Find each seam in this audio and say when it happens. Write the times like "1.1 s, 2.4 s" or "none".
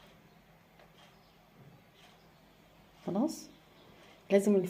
none